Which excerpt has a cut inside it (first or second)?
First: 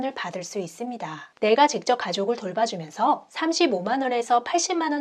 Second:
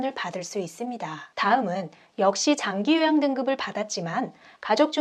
first